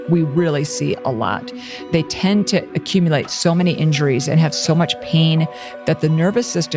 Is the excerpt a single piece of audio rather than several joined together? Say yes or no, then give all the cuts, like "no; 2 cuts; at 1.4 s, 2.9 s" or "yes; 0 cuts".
no; 2 cuts; at 1.7 s, 5.7 s